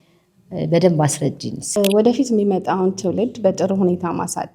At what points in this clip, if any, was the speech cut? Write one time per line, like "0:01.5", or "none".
0:01.8